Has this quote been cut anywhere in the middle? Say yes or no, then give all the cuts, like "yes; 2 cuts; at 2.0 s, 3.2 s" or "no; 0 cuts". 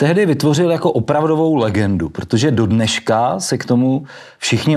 no; 0 cuts